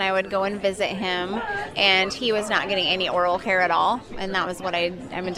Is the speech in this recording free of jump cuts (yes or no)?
yes